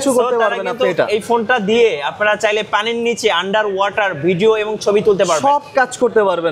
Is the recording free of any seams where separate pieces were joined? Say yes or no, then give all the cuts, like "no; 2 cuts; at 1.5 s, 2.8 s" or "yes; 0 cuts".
yes; 0 cuts